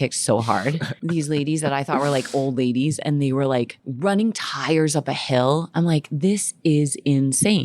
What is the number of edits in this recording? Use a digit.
2